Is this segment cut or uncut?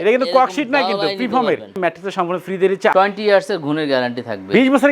cut